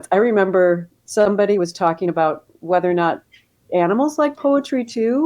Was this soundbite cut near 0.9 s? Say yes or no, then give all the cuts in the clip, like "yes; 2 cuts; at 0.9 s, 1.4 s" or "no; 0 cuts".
yes; 1 cut; at 0.9 s